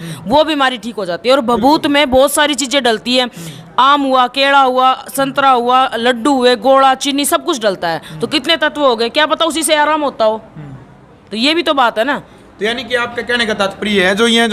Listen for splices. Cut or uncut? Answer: uncut